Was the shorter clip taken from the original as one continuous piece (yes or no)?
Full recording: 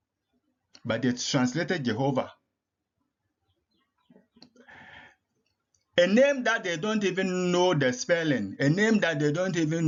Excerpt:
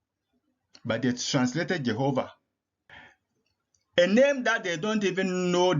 no